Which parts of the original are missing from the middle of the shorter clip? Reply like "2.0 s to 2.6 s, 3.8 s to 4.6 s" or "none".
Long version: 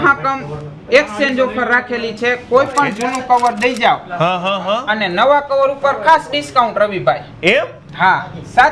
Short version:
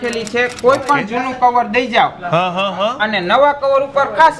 none